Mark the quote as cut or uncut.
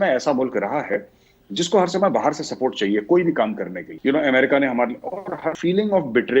cut